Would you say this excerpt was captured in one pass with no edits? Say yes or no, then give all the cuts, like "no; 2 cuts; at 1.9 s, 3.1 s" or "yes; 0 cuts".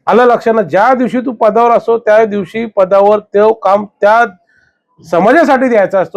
yes; 0 cuts